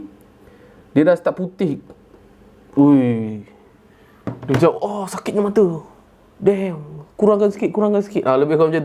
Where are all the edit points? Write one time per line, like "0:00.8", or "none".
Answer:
none

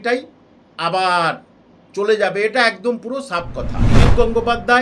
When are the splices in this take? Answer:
0:03.9

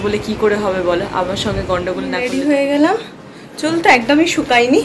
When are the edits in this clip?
0:02.2

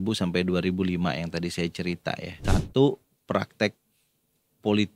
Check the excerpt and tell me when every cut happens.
0:02.3

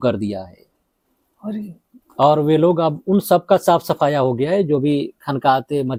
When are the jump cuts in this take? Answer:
none

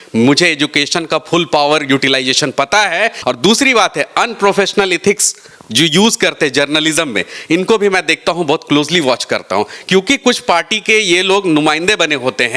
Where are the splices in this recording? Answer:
0:03.2

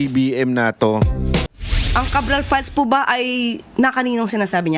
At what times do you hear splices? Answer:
0:01.5

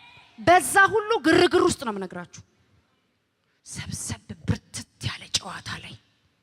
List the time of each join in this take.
none

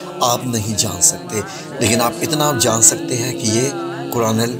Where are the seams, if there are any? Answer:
none

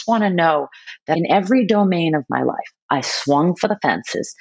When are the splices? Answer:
0:01.2

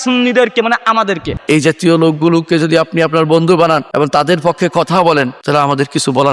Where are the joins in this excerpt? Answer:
0:01.5
0:03.9
0:05.4

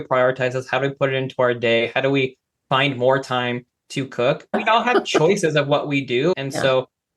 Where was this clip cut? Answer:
0:04.6
0:06.3

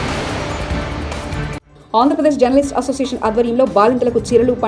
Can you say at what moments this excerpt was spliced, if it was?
none

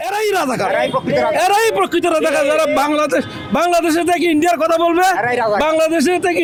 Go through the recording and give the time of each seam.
none

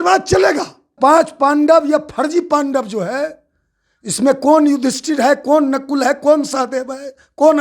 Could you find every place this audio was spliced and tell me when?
0:00.9

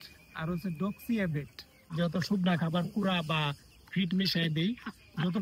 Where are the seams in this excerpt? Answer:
0:01.8

